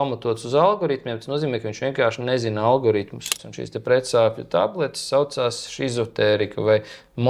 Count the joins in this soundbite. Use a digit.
1